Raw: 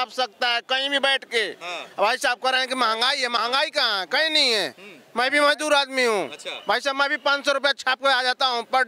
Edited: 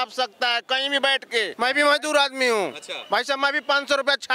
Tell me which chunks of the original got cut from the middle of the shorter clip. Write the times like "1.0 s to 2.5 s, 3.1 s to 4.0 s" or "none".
1.5 s to 5.1 s

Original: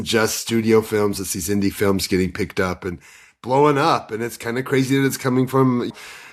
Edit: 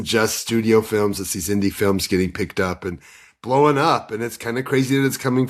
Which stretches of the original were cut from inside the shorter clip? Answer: none

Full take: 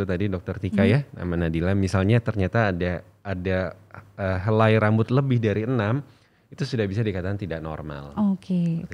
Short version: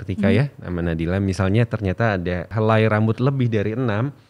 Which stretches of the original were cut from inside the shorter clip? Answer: 3.0 s to 4.4 s

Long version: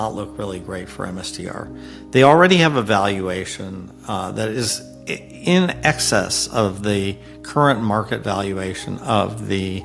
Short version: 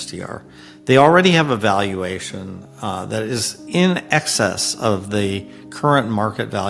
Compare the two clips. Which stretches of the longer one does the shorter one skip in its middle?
4.8 s to 5.3 s

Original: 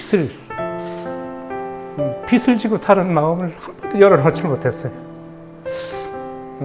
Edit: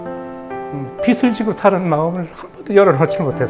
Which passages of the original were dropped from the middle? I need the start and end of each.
2.1 s to 2.3 s

